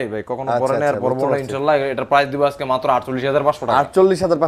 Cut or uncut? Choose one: uncut